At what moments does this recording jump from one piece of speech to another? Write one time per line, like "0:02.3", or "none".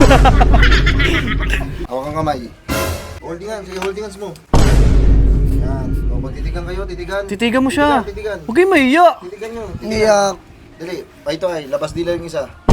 0:01.8
0:03.1